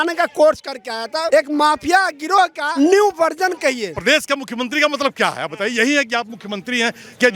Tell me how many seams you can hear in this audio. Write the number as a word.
three